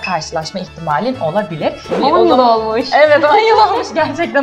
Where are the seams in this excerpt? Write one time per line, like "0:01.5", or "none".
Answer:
0:01.9

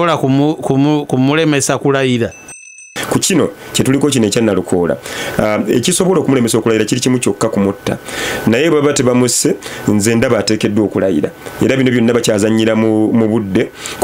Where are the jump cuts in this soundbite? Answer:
0:02.7

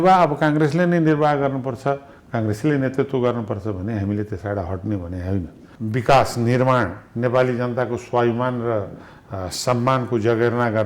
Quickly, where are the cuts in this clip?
0:05.6

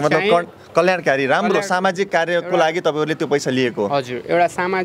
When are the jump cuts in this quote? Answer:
none

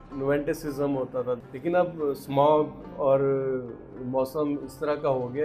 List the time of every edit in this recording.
0:01.4

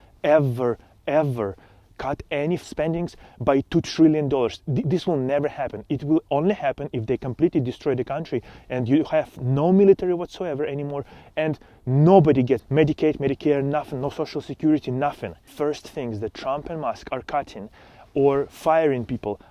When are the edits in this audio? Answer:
0:02.6
0:12.6
0:15.4

